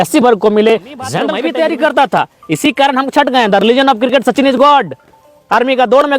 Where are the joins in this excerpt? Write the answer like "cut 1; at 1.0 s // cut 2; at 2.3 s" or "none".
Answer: cut 1; at 1.2 s